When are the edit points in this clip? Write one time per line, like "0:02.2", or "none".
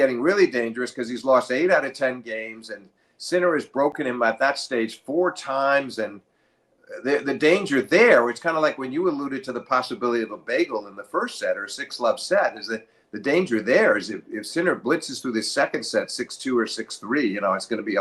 none